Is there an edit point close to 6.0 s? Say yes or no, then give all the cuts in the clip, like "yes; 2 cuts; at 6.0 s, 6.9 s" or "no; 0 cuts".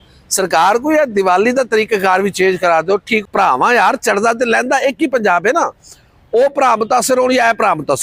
no; 1 cut; at 3.2 s